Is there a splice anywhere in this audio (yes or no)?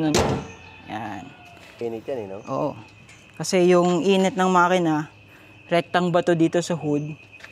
yes